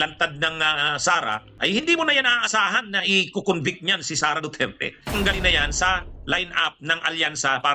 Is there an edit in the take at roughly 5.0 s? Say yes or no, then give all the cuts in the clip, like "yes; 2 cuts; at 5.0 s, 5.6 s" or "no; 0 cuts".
yes; 2 cuts; at 1.5 s, 5.0 s